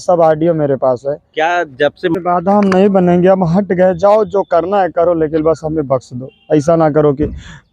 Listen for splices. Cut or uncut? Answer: cut